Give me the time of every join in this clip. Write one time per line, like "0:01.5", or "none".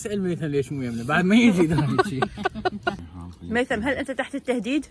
0:03.0

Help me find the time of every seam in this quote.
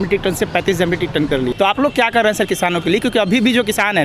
0:01.5

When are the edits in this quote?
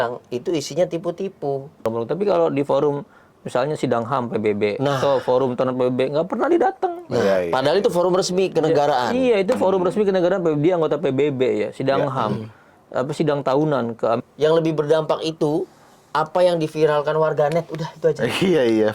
0:01.9
0:14.2

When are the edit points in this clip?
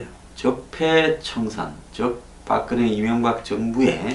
0:01.5

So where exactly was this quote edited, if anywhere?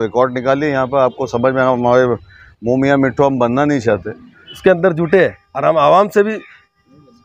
0:04.6

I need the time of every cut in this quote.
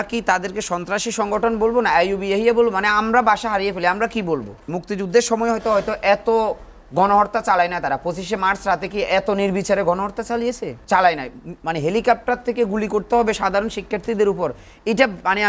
0:04.8
0:10.7

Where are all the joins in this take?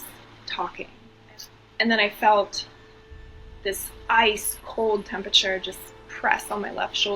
0:01.1

